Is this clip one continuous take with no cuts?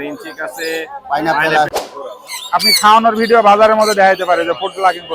no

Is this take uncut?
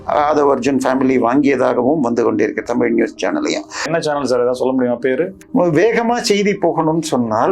no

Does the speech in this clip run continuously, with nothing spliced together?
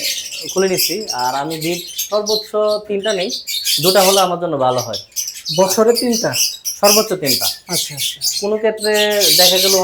yes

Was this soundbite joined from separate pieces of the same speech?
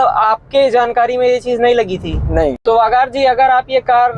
yes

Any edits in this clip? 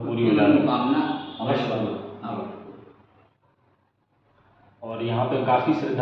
no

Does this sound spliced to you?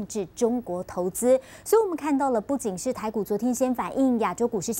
no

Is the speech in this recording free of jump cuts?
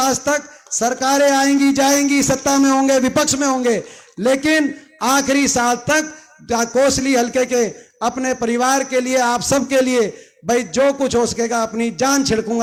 yes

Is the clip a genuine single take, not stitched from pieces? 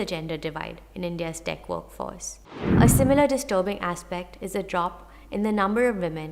no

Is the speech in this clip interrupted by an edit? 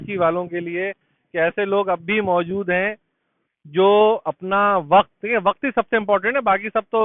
no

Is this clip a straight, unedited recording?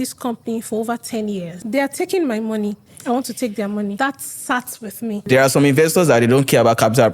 no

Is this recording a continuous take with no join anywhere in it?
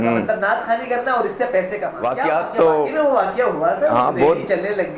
no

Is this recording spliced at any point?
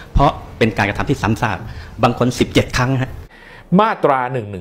yes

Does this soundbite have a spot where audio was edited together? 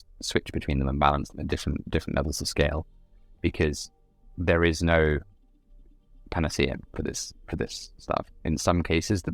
no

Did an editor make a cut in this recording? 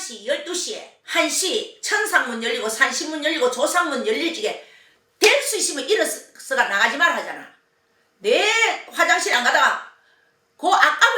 yes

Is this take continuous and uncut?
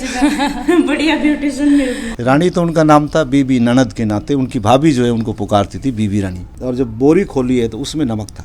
no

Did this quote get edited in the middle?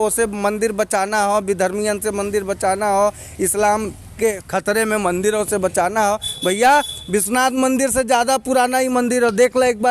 yes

